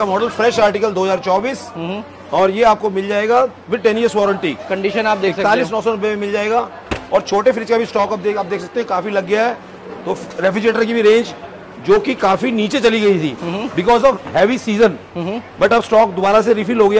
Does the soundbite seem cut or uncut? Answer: uncut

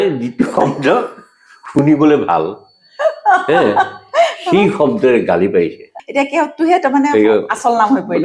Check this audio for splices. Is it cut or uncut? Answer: cut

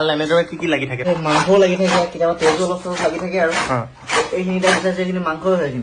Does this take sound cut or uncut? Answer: cut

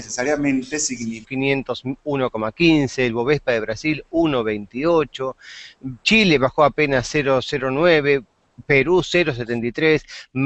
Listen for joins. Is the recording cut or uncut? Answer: uncut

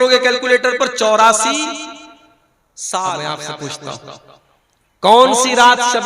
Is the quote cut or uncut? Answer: cut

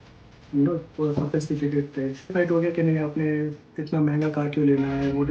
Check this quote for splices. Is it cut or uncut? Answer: cut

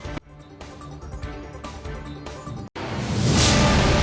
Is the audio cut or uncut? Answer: cut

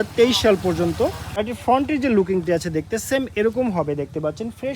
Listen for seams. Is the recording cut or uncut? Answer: cut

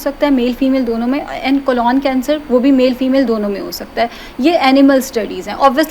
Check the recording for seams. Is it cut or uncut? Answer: uncut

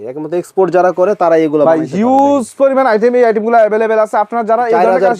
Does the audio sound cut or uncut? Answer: uncut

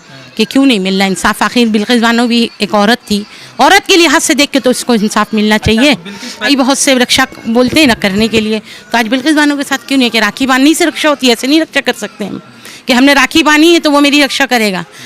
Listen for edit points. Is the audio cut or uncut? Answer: cut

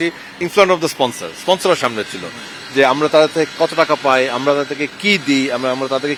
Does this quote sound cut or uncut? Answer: uncut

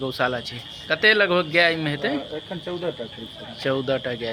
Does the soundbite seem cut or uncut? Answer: uncut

